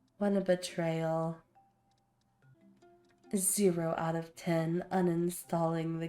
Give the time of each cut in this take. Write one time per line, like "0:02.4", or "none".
0:02.6